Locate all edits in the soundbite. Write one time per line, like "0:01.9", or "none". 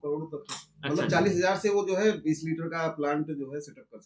none